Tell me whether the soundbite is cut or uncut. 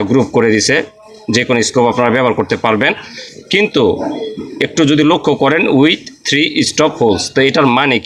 uncut